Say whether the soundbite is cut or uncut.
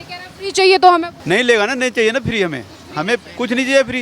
cut